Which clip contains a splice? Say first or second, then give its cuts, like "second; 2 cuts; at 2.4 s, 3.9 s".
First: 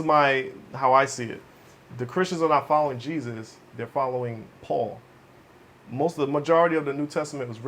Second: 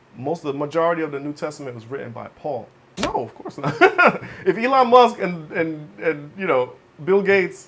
second; 1 cut; at 2.9 s